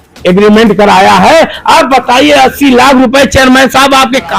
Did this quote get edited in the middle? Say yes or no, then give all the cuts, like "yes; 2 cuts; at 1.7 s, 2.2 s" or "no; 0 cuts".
no; 0 cuts